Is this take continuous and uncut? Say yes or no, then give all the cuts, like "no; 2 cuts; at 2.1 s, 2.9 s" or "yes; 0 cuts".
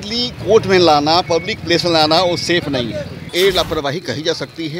no; 1 cut; at 3.3 s